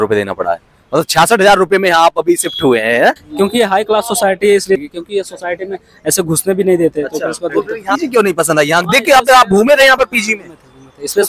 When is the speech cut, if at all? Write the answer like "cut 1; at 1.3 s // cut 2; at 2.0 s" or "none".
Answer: cut 1; at 3.2 s // cut 2; at 4.8 s // cut 3; at 7.9 s